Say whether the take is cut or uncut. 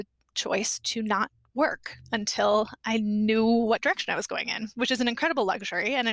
uncut